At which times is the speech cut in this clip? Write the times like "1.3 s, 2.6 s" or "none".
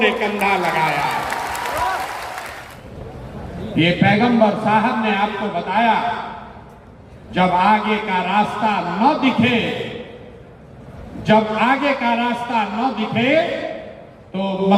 2.4 s